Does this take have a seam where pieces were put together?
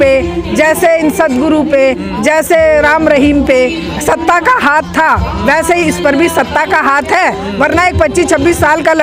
no; 0 cuts

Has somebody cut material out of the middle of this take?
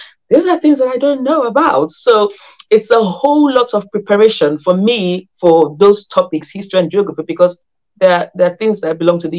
no; 0 cuts

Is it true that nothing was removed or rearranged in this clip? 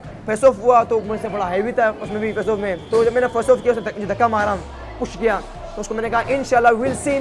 no; 1 cut; at 2.8 s

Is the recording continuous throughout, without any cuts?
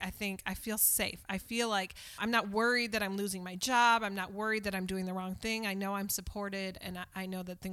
no; 1 cut; at 2.2 s

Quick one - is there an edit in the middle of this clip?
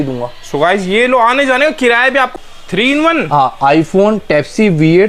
yes; 1 cut; at 2.3 s

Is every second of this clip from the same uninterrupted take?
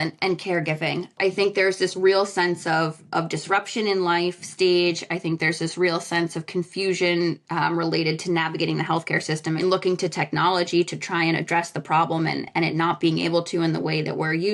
no; 2 cuts; at 1.1 s, 9.6 s

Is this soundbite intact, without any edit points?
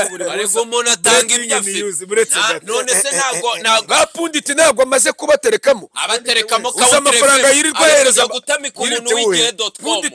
yes; 0 cuts

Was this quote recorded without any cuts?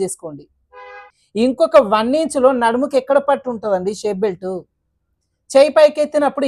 no; 1 cut; at 1.1 s

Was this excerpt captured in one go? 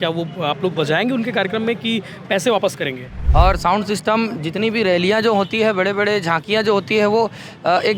no; 1 cut; at 3.1 s

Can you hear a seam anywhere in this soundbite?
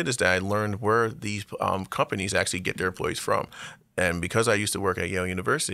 no; 0 cuts

